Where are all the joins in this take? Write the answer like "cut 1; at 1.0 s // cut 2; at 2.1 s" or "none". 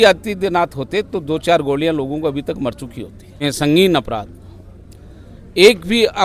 cut 1; at 3.4 s